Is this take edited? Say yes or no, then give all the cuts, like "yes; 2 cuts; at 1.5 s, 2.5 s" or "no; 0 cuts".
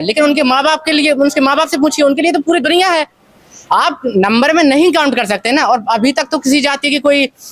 no; 0 cuts